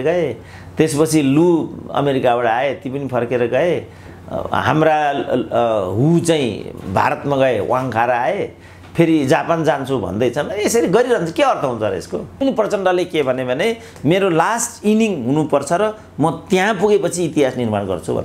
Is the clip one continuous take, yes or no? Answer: no